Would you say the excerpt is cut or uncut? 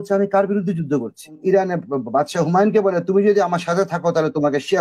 cut